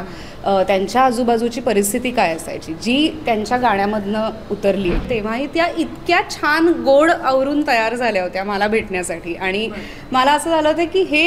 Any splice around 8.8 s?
no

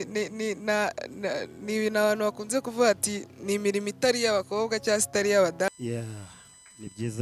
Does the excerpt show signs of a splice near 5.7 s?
yes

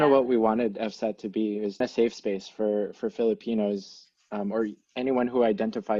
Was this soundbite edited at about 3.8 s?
no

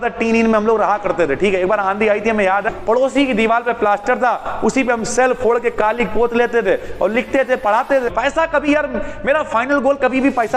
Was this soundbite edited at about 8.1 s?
yes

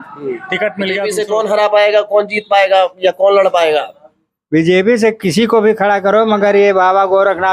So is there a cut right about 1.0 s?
yes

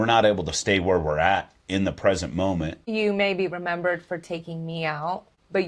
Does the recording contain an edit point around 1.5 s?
no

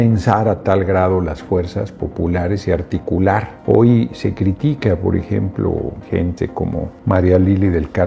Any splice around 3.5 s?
yes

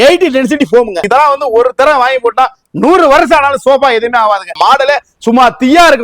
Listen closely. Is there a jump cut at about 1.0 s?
yes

